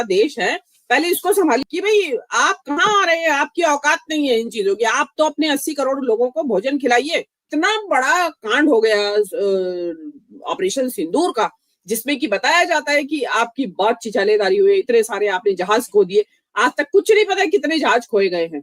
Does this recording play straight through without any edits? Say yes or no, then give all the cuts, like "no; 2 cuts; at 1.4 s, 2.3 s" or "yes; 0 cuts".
no; 2 cuts; at 1.7 s, 7.5 s